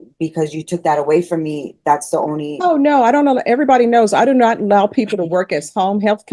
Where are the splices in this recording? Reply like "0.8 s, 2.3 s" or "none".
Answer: none